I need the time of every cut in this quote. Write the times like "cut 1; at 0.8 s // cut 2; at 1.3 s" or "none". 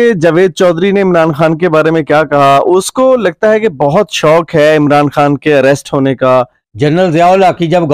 cut 1; at 6.6 s